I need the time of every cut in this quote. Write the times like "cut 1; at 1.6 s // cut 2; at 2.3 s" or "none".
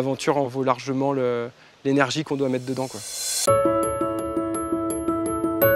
cut 1; at 3.3 s